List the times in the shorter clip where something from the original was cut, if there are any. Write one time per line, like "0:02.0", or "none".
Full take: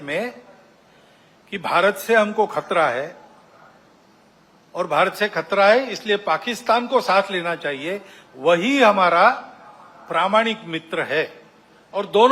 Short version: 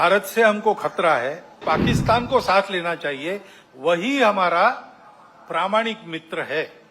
0:01.6